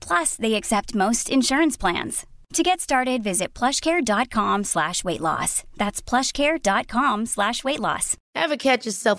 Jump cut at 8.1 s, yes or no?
yes